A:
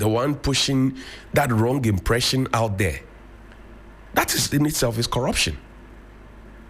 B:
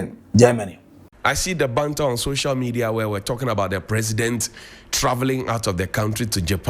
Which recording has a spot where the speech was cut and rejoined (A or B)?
B